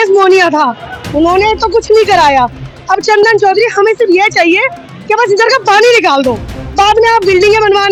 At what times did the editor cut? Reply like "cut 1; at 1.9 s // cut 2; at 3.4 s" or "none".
none